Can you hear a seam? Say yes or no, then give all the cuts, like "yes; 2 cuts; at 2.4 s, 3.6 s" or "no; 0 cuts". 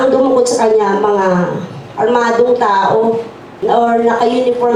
no; 0 cuts